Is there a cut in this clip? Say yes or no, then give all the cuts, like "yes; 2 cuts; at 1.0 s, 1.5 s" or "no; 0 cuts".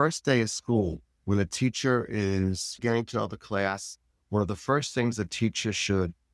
no; 0 cuts